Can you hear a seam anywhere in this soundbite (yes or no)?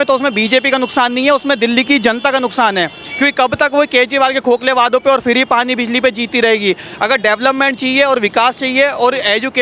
no